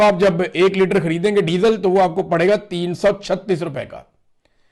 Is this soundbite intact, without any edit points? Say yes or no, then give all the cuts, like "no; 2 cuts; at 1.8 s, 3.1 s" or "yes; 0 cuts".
yes; 0 cuts